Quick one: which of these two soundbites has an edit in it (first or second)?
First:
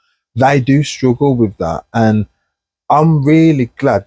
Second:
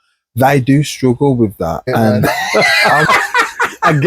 second